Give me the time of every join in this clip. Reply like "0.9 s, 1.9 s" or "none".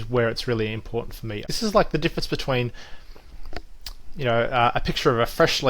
1.5 s